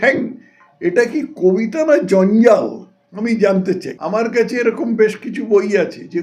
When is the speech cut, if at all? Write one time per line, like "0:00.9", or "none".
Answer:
0:03.9